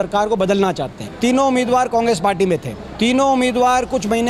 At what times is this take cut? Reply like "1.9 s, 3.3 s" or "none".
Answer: 1.1 s, 2.8 s